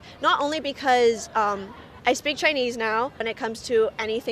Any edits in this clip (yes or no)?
yes